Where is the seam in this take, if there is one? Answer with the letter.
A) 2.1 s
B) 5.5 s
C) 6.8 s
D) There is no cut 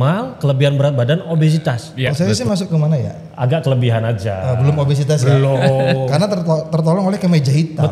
A